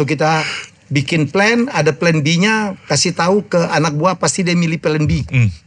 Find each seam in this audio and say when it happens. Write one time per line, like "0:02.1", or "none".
none

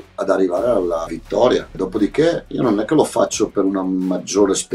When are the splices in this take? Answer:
0:01.2
0:02.5

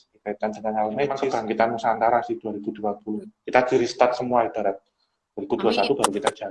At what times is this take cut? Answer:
0:01.2

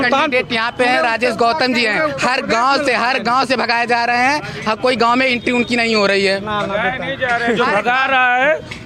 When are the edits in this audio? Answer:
none

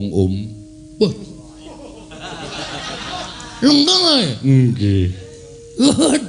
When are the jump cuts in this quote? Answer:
0:01.3

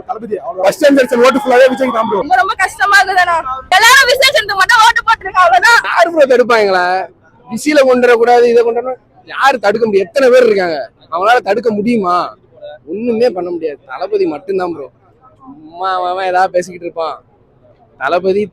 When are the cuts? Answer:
0:02.3
0:03.7
0:05.9

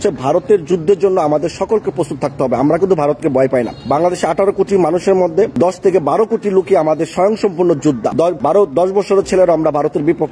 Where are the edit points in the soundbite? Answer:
0:03.8
0:05.5
0:08.2

